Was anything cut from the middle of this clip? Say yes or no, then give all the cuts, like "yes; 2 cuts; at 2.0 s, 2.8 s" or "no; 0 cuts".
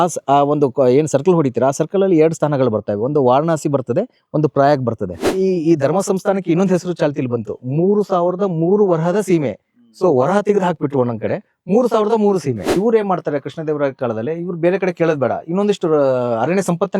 yes; 2 cuts; at 5.3 s, 12.8 s